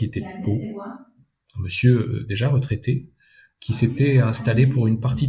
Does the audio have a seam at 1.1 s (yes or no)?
no